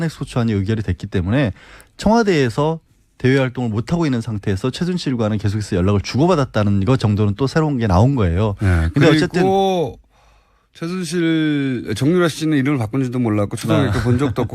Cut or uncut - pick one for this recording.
cut